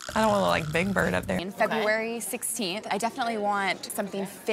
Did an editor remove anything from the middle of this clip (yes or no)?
yes